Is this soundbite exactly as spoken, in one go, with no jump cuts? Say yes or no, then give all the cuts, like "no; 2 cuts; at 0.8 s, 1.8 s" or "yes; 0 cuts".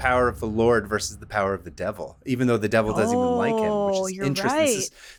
yes; 0 cuts